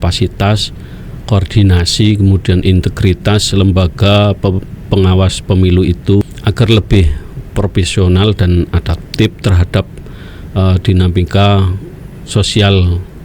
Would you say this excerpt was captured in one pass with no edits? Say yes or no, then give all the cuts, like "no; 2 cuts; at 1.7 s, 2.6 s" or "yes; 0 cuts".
no; 1 cut; at 6.2 s